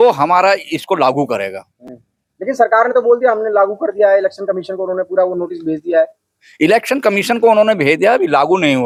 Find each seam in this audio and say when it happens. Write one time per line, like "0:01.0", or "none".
none